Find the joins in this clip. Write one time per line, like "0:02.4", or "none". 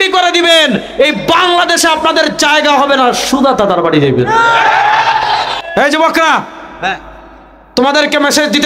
0:05.6